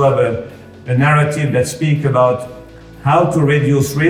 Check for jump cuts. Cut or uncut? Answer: uncut